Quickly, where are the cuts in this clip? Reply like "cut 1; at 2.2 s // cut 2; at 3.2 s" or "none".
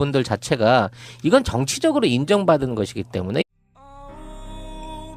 none